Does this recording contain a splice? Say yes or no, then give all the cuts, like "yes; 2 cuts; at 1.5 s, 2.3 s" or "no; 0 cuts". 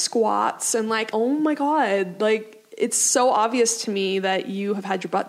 yes; 1 cut; at 1.1 s